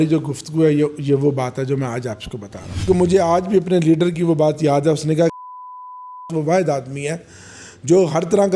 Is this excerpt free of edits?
no; 1 cut; at 2.7 s

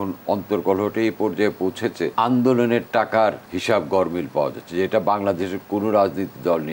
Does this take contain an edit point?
yes; 2 cuts; at 2.1 s, 3.5 s

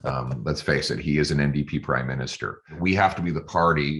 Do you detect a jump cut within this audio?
yes; 1 cut; at 2.8 s

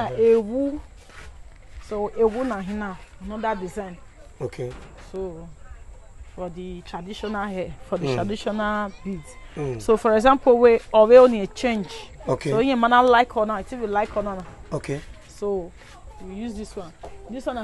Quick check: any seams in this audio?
no; 0 cuts

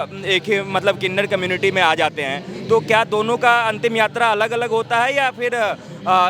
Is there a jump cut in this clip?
no; 0 cuts

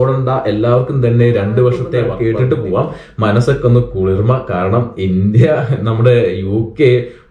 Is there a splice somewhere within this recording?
yes; 1 cut; at 2.1 s

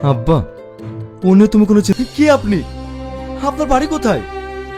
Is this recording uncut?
no; 1 cut; at 1.9 s

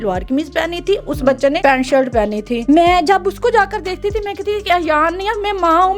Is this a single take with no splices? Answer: no; 2 cuts; at 1.6 s, 2.6 s

